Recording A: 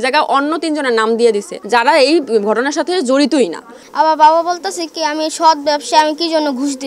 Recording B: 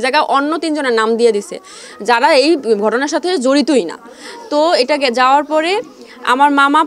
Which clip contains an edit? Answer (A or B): A